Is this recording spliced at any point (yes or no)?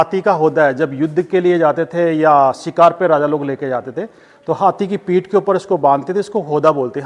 no